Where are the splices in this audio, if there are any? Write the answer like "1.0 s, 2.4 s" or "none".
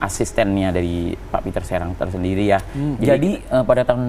3.0 s